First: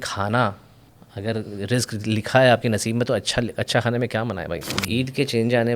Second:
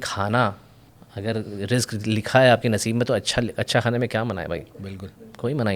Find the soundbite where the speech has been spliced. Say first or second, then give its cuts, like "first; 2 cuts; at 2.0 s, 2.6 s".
first; 1 cut; at 4.7 s